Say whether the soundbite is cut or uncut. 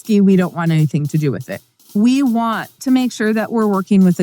cut